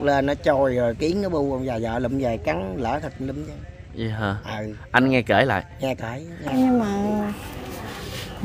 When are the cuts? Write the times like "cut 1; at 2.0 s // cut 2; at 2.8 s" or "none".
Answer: cut 1; at 6.5 s